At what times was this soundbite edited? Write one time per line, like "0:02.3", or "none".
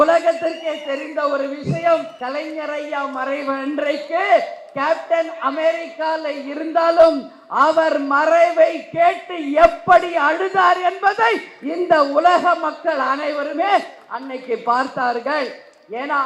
0:02.1